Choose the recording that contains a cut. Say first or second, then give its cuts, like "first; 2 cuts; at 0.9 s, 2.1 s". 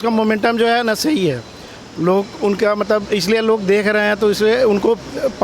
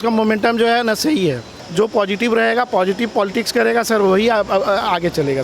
second; 1 cut; at 1.6 s